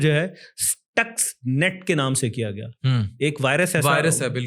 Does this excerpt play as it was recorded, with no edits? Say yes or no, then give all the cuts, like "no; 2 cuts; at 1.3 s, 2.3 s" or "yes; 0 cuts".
yes; 0 cuts